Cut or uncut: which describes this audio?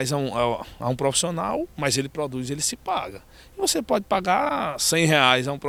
uncut